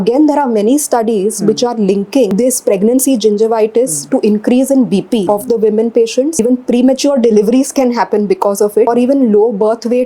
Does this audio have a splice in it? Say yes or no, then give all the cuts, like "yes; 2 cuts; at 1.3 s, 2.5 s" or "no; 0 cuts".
yes; 4 cuts; at 2.3 s, 5.2 s, 6.4 s, 8.9 s